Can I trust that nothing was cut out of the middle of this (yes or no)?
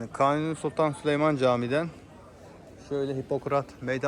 yes